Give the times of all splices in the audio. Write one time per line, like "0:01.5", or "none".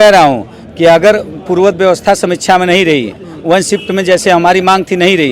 none